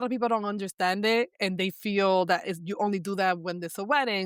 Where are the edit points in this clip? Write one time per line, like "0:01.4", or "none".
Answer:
none